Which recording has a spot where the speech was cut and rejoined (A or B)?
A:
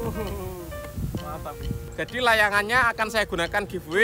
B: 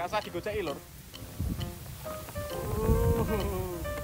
A